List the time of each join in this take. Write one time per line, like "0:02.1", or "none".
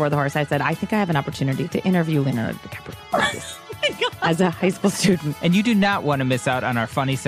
0:05.3